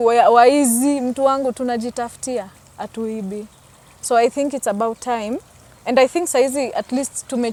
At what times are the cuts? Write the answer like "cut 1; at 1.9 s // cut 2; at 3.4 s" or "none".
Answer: none